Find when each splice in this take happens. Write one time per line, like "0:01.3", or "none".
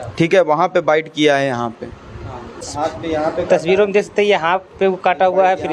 0:02.7